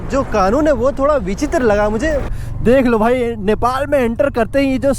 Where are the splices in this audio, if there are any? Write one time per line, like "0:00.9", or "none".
0:02.4